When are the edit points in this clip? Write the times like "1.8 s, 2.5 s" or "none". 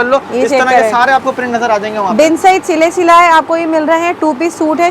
none